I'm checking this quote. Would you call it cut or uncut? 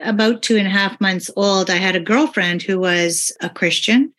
cut